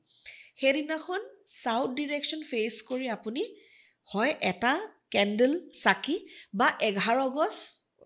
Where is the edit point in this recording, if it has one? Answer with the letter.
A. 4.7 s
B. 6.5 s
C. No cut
C